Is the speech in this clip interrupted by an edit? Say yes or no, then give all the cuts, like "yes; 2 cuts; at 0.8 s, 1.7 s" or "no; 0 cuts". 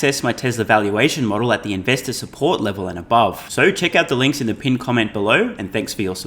no; 0 cuts